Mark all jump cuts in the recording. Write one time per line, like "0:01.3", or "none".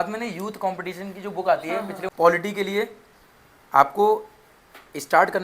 0:02.0